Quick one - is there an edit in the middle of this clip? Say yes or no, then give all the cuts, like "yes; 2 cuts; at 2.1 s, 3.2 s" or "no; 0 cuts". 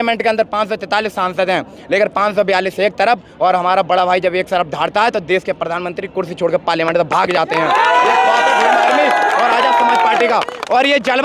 no; 0 cuts